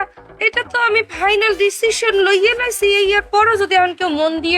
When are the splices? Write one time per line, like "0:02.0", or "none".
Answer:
none